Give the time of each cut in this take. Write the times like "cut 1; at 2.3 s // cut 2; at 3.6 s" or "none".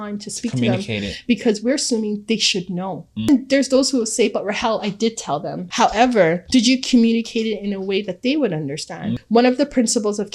cut 1; at 3.3 s // cut 2; at 5.6 s // cut 3; at 9.2 s